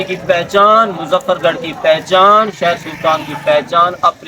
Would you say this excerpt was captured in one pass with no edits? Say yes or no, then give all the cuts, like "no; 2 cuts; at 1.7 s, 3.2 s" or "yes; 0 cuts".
yes; 0 cuts